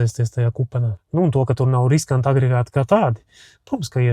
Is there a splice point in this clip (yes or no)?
yes